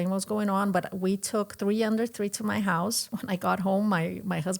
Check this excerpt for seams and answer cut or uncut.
cut